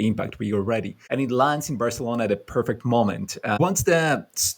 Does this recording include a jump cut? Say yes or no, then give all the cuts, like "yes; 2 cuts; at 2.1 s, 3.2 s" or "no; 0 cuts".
yes; 2 cuts; at 1.0 s, 3.6 s